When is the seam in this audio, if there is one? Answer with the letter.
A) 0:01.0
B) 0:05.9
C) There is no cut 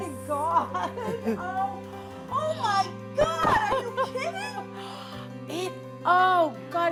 C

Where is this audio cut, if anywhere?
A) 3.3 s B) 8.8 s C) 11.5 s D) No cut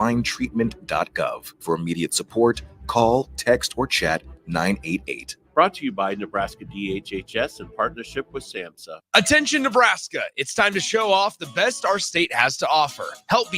B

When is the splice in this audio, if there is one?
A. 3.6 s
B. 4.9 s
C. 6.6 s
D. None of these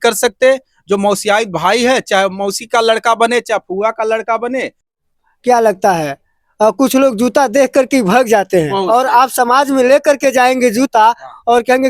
B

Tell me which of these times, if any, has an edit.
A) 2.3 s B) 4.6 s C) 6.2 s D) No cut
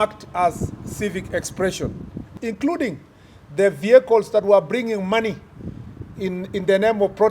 A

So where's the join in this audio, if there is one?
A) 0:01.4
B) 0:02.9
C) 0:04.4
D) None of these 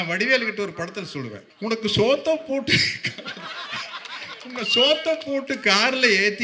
A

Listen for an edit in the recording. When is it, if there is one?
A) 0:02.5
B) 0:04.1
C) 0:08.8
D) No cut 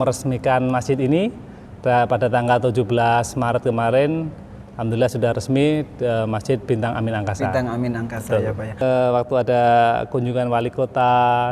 C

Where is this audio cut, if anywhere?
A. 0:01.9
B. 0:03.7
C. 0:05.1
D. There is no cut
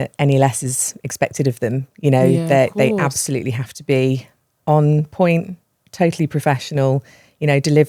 D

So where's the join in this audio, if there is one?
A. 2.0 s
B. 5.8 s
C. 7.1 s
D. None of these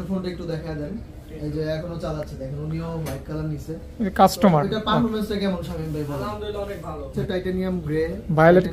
C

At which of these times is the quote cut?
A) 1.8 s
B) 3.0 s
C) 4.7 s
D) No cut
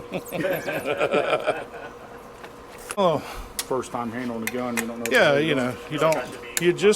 B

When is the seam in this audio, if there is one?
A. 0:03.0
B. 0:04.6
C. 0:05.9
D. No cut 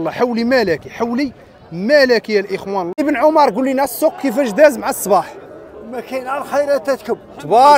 A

